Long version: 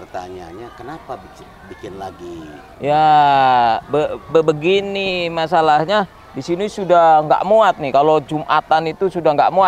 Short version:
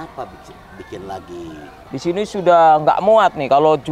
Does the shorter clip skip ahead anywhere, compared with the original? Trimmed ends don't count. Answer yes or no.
yes